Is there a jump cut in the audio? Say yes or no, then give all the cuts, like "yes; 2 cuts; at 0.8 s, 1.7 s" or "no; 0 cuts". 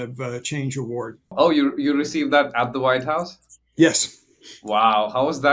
yes; 1 cut; at 1.3 s